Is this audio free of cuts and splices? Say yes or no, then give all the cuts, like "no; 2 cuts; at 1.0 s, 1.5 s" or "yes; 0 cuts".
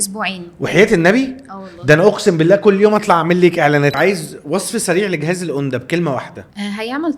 no; 1 cut; at 3.9 s